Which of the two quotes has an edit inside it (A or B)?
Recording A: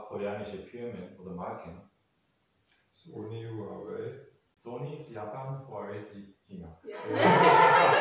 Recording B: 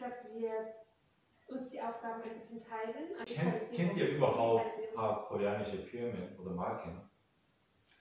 B